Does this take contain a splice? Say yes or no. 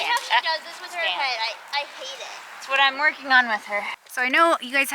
yes